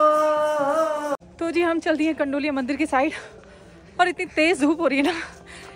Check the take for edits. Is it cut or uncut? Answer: cut